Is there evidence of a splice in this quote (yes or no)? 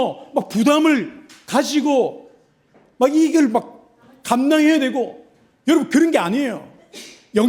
no